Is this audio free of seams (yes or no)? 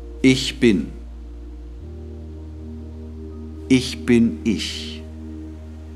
yes